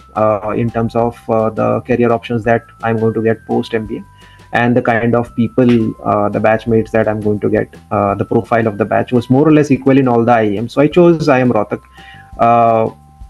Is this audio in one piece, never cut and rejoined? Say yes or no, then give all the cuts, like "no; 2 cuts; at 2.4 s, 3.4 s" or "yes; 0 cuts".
yes; 0 cuts